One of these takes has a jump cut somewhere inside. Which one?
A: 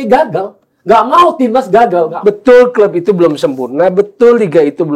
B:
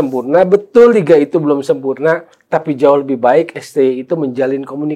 A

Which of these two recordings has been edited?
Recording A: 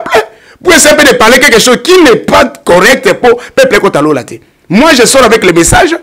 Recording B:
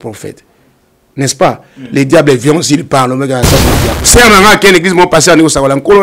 B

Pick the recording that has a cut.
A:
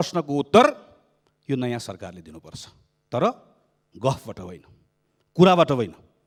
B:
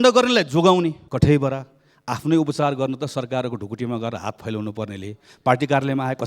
B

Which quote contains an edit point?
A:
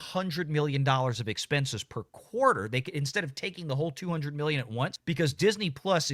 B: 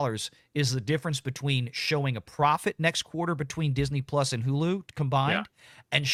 A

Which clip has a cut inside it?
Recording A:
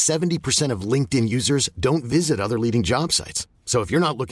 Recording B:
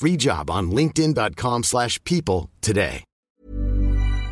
B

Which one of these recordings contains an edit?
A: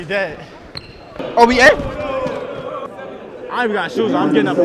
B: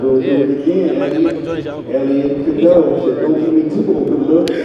A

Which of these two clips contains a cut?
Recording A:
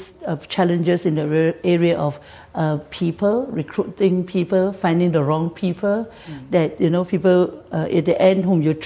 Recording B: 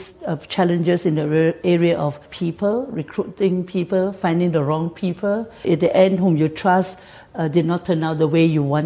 B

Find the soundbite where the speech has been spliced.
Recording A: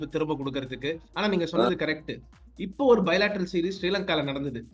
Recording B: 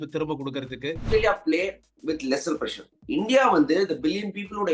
B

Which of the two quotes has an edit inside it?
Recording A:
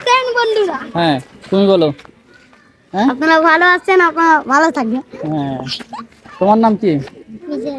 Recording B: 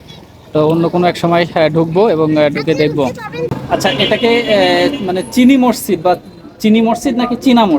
B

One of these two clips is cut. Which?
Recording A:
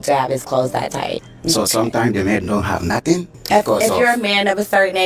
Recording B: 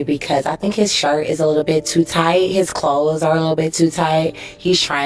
A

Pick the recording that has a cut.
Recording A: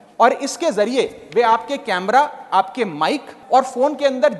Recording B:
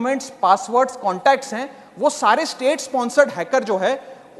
A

